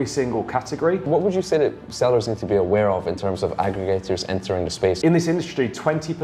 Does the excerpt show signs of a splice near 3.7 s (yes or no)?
no